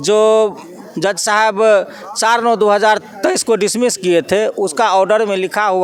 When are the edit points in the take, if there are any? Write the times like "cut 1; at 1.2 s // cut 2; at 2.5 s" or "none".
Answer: none